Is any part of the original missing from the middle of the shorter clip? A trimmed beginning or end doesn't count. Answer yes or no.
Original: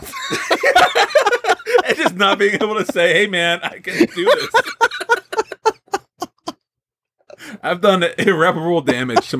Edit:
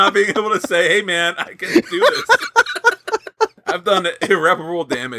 yes